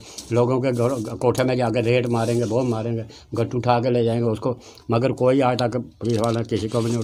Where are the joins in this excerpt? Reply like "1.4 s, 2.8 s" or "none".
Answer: none